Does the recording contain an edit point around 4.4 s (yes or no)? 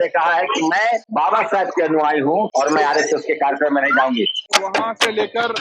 yes